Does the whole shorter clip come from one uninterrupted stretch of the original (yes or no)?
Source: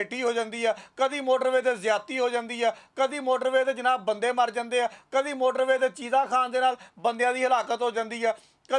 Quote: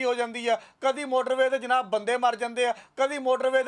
yes